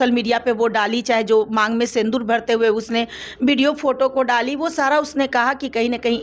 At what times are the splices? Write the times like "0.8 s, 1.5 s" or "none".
none